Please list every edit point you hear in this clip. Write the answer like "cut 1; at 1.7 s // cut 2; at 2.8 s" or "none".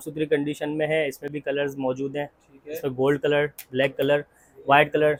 none